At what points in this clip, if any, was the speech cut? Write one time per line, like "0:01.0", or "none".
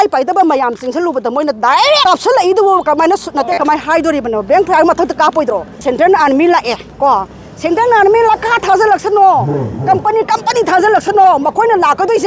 0:05.8